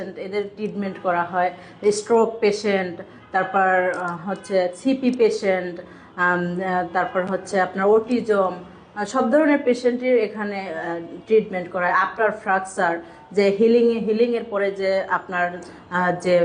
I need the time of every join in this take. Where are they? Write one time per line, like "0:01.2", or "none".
none